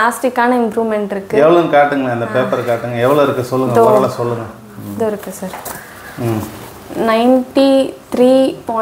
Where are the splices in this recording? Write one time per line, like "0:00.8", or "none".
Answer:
none